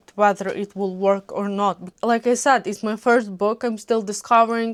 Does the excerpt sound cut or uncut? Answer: uncut